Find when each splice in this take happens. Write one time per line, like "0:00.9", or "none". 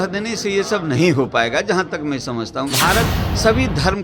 0:02.7